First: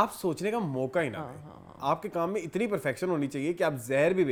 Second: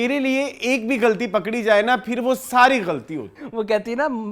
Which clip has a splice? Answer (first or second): second